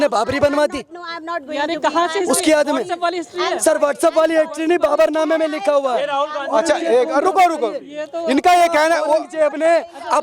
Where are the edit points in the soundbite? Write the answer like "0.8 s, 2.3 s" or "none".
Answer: none